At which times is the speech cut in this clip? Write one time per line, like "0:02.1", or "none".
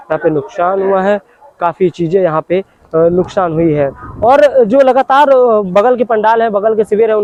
none